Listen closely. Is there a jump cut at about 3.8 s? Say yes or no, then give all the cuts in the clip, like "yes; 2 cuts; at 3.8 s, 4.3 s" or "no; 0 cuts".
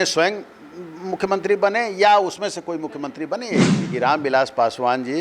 yes; 1 cut; at 3.8 s